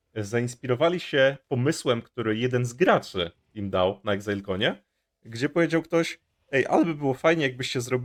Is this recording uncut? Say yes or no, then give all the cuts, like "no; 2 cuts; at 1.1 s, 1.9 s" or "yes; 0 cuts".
yes; 0 cuts